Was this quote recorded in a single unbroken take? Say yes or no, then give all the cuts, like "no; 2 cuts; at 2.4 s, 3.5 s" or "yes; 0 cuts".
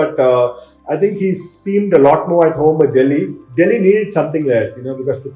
no; 1 cut; at 3.4 s